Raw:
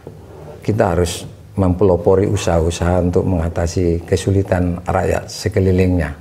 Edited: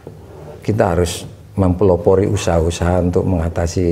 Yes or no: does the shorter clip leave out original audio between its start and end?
no